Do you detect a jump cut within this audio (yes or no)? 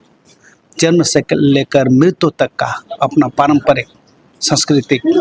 no